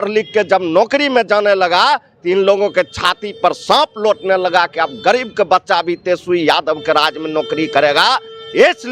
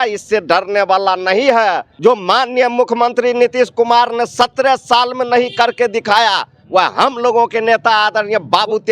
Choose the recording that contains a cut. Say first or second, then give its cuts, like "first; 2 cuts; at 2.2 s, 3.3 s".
second; 1 cut; at 1.9 s